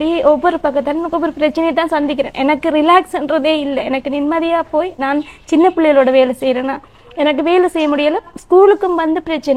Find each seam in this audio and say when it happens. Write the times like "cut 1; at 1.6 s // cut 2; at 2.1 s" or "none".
none